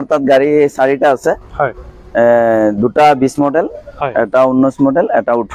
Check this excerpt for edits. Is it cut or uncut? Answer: uncut